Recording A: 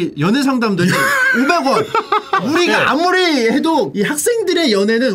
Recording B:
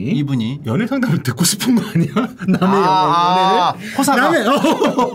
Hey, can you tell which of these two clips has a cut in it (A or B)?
A